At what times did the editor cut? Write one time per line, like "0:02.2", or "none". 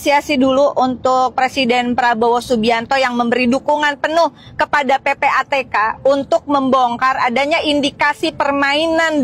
none